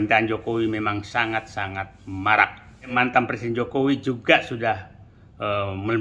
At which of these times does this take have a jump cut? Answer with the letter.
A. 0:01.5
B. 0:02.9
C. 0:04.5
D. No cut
B